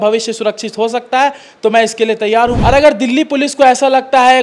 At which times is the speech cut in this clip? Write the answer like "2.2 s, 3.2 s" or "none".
2.6 s